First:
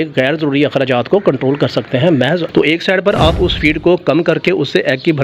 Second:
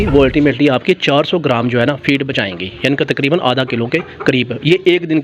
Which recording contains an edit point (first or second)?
first